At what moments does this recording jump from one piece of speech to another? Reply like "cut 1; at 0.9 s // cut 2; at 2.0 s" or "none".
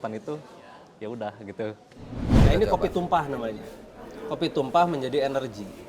cut 1; at 2.4 s